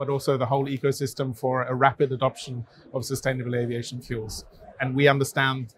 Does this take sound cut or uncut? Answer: cut